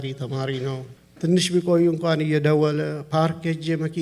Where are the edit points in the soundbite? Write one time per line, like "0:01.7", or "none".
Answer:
0:01.0